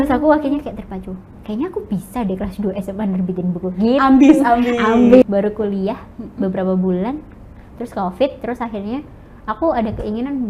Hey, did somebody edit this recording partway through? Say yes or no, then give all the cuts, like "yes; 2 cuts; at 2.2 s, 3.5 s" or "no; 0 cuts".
yes; 1 cut; at 5.2 s